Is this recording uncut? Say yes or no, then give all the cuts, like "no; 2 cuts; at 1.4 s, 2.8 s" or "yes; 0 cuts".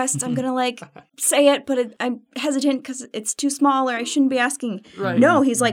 yes; 0 cuts